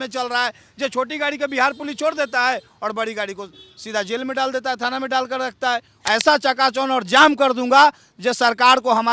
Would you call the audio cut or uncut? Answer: cut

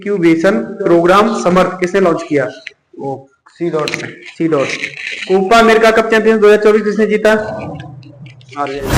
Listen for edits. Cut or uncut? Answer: uncut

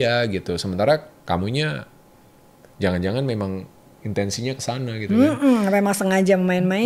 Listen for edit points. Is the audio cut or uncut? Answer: uncut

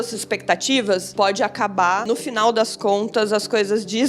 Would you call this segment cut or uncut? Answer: cut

